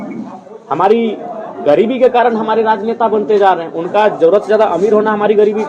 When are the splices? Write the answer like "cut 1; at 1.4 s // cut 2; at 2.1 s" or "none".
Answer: none